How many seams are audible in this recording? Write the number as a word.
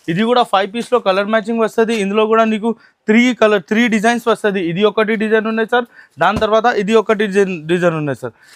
zero